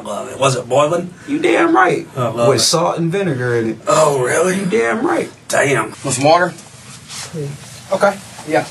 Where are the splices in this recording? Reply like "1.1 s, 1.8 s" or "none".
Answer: 6.0 s